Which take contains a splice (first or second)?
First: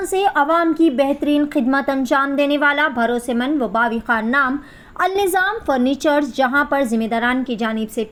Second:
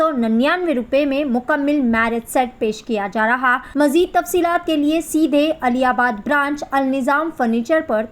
second